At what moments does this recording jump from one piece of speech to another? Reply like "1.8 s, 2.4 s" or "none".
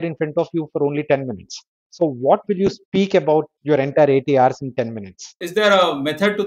5.3 s